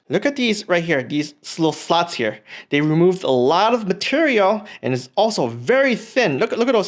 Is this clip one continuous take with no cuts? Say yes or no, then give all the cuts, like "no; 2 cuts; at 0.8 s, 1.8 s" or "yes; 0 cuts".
yes; 0 cuts